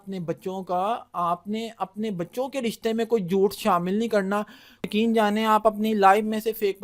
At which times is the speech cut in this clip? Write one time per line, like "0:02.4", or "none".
0:04.8